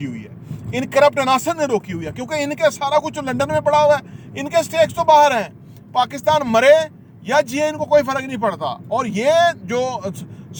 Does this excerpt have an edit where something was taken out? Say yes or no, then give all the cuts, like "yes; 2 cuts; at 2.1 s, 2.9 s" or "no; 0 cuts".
no; 0 cuts